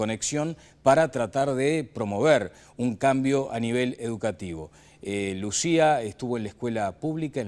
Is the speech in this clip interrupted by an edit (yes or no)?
yes